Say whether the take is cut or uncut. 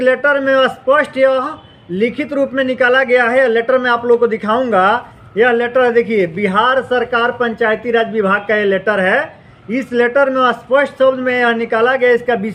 uncut